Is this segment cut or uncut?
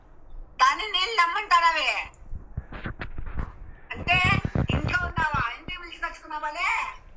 uncut